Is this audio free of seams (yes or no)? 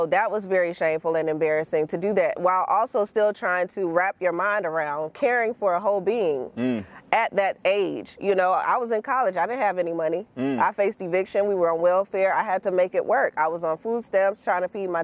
yes